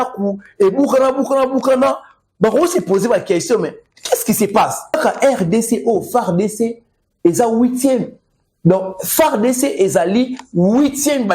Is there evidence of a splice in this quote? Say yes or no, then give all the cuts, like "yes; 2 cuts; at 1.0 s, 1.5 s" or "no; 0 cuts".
yes; 1 cut; at 5.0 s